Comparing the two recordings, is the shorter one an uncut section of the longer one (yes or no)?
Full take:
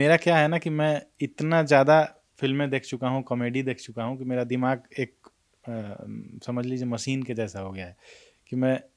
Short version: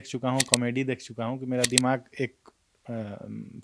yes